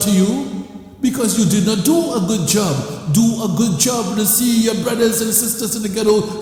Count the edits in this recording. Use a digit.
0